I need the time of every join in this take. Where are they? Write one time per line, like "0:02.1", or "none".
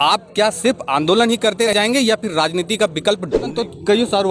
0:01.7
0:03.4